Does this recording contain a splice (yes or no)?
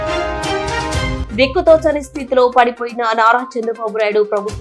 no